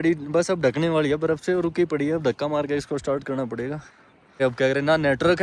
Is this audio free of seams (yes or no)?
no